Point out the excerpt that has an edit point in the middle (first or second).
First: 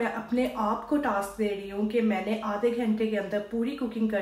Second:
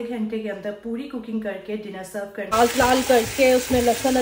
second